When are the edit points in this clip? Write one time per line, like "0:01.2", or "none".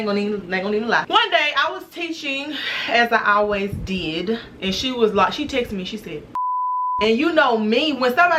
0:01.1
0:02.7
0:04.5